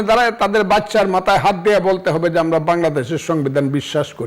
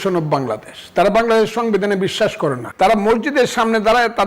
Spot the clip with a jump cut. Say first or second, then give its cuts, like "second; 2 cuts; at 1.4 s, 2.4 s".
second; 1 cut; at 2.6 s